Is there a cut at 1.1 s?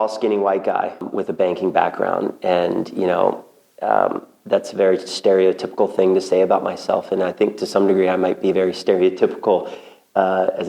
yes; 1 cut; at 1.1 s

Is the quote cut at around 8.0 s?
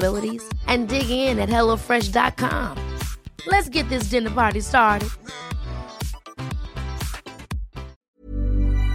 yes; 1 cut; at 8.0 s

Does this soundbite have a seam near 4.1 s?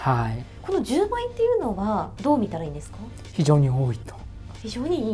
no; 1 cut; at 2.1 s

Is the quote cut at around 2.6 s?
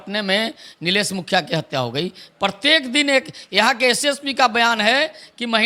no; 0 cuts

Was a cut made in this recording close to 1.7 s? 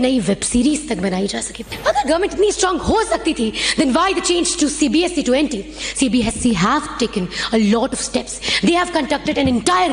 yes; 1 cut; at 1.7 s

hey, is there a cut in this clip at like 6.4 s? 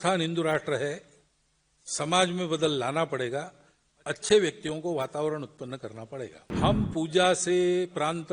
yes; 1 cut; at 6.4 s

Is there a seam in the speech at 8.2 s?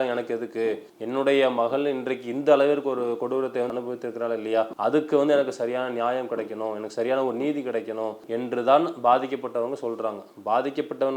yes; 2 cuts; at 0.9 s, 8.2 s

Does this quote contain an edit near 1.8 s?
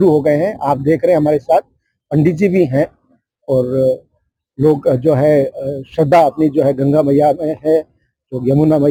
no; 0 cuts

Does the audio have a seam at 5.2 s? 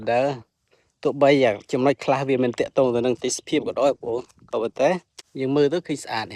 yes; 1 cut; at 5.2 s

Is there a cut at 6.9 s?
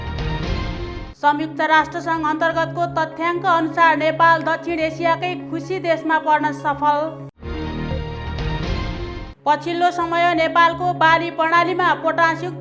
no; 1 cut; at 1.0 s

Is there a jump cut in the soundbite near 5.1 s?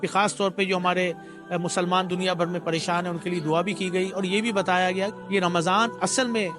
yes; 1 cut; at 5.1 s

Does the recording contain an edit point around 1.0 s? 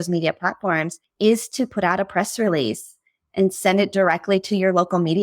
yes; 1 cut; at 1.0 s

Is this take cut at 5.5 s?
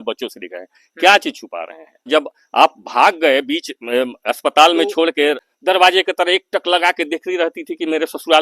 yes; 2 cuts; at 2.1 s, 5.5 s

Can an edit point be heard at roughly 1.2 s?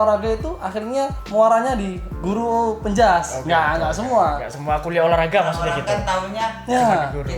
yes; 1 cut; at 1.2 s

